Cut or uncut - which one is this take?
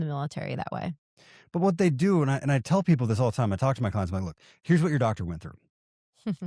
uncut